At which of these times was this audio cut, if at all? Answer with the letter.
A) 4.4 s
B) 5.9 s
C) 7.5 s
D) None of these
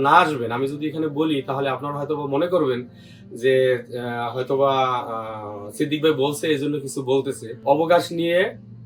C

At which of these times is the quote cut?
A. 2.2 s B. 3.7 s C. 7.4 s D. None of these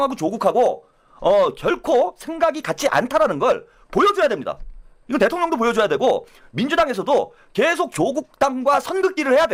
D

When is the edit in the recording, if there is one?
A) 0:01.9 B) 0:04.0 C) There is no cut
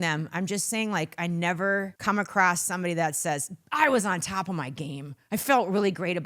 A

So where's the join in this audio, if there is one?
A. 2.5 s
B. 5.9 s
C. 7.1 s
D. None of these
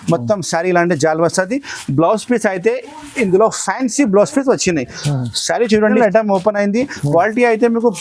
B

